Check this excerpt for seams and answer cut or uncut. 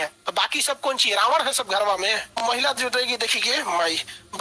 cut